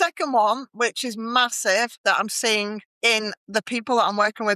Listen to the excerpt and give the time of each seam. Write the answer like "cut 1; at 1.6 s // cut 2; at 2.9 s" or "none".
cut 1; at 2.0 s // cut 2; at 2.9 s